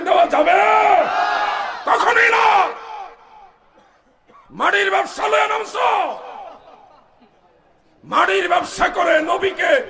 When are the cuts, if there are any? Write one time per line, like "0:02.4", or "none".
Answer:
none